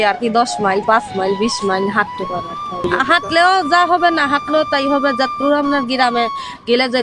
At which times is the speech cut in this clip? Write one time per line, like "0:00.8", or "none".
0:02.5